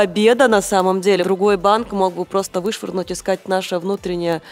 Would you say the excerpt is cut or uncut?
cut